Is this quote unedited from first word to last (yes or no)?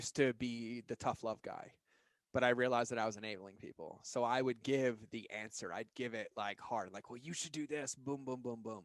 yes